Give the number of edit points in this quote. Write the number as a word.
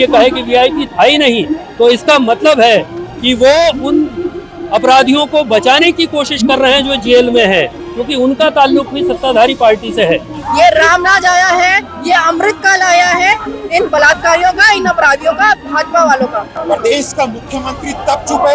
two